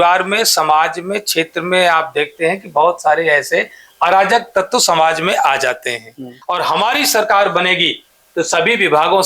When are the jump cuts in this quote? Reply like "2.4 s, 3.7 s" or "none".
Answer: 6.3 s